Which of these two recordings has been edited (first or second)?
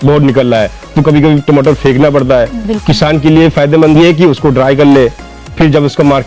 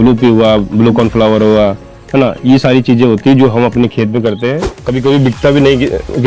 second